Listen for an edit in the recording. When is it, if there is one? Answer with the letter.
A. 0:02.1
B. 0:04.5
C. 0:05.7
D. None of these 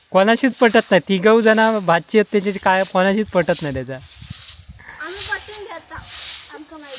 D